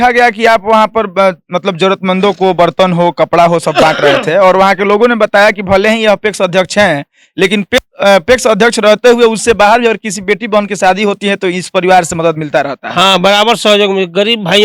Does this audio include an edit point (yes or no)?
no